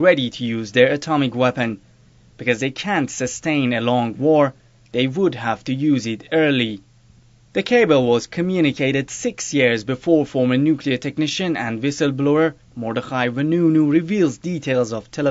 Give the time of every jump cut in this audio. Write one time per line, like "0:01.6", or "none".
0:07.1